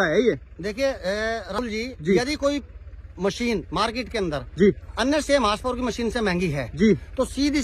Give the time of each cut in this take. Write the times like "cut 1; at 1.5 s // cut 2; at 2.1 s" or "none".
cut 1; at 1.6 s